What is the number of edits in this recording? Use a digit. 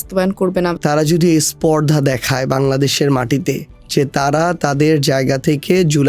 2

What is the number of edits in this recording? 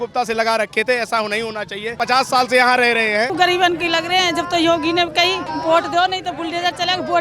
3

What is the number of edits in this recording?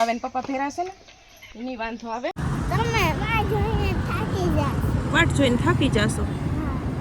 1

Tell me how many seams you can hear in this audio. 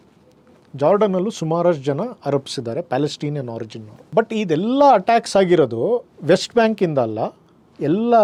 0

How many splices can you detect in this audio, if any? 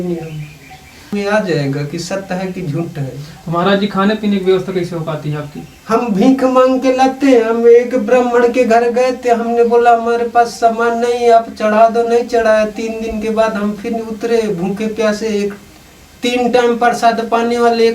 1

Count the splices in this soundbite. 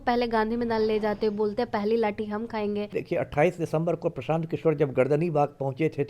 1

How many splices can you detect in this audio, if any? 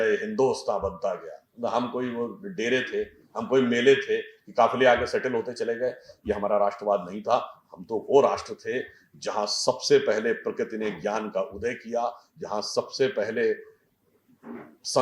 0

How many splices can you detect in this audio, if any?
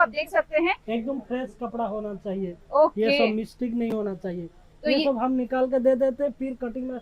0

